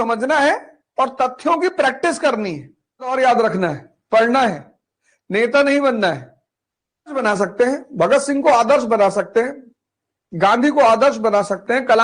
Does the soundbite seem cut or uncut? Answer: cut